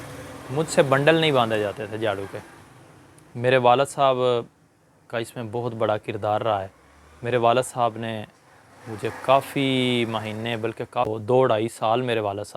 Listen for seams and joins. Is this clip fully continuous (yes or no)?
no